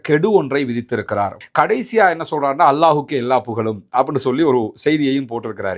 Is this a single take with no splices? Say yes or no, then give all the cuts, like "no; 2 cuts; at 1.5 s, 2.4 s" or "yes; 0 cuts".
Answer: no; 1 cut; at 1.4 s